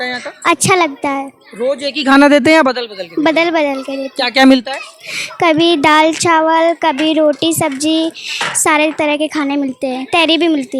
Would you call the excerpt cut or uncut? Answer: uncut